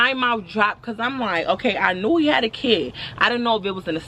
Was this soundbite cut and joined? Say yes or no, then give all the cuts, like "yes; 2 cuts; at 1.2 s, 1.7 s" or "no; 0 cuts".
no; 0 cuts